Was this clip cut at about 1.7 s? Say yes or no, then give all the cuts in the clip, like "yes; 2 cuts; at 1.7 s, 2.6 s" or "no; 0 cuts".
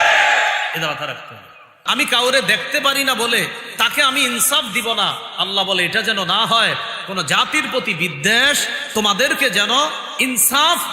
yes; 1 cut; at 1.7 s